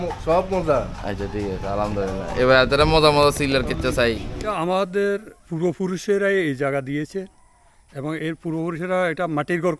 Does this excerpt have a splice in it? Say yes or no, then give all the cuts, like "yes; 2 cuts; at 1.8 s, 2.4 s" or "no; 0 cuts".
yes; 1 cut; at 4.5 s